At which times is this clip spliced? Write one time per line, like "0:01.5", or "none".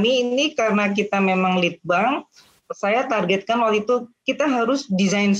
none